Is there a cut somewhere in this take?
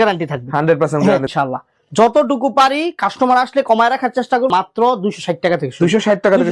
yes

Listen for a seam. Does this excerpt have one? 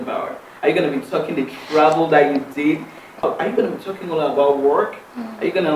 yes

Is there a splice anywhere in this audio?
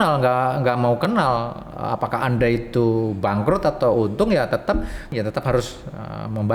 yes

